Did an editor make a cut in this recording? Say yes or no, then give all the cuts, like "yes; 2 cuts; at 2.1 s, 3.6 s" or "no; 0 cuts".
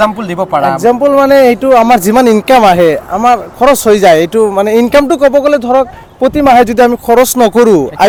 no; 0 cuts